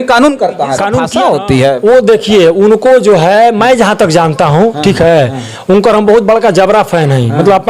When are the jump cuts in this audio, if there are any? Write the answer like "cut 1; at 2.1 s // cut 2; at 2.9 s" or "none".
cut 1; at 1.1 s